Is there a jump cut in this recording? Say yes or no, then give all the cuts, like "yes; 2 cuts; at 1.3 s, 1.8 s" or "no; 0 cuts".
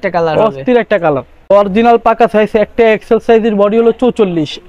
yes; 1 cut; at 1.5 s